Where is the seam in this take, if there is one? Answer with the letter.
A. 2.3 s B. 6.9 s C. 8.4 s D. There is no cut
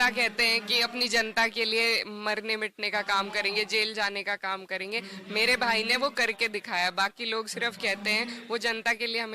D